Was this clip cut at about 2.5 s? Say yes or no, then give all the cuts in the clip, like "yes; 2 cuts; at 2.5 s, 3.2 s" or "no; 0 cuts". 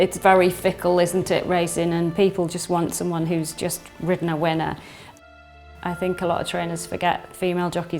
no; 1 cut; at 5.2 s